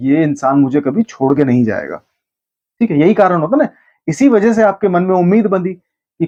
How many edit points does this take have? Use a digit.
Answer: 0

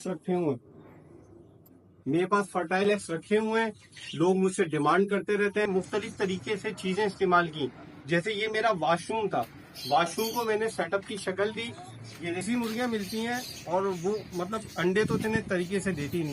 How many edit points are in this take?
2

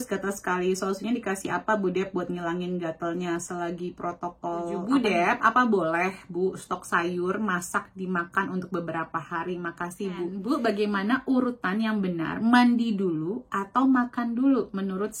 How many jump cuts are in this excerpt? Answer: 2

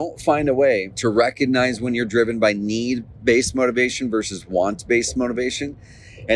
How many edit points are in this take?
1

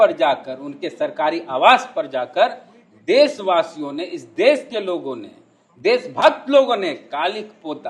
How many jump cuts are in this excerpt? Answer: 0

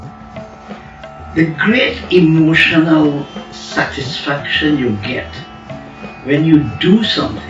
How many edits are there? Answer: 1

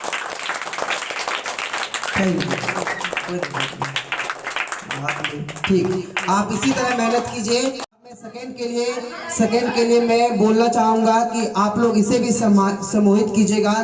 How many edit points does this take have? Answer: 1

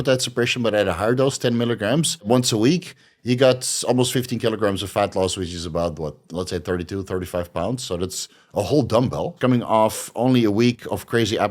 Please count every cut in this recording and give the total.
2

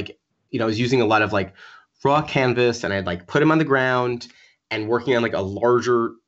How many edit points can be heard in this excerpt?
0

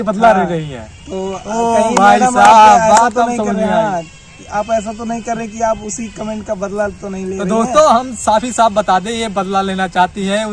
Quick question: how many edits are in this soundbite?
0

